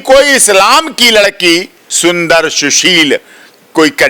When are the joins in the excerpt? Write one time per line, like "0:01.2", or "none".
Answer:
0:01.8